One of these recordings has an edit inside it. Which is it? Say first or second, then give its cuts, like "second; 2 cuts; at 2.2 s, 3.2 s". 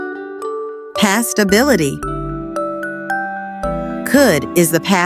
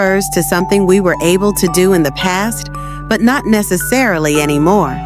first; 1 cut; at 1.0 s